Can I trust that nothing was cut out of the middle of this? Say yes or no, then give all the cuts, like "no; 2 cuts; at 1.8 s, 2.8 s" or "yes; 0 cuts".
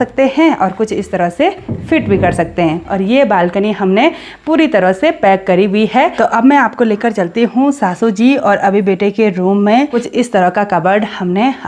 no; 3 cuts; at 2.9 s, 6.1 s, 10.0 s